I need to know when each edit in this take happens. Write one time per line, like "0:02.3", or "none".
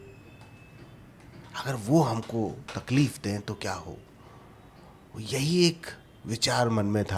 none